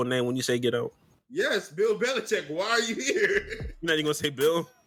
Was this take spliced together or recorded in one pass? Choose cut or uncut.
uncut